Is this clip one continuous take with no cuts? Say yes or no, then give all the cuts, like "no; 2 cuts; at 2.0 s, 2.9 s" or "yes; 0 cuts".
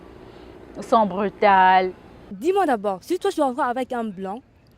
no; 1 cut; at 2.4 s